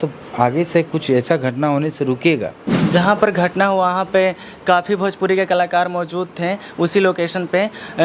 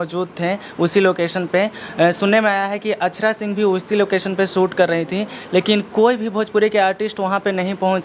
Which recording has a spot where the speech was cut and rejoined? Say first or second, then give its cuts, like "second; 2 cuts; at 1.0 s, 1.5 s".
first; 1 cut; at 2.6 s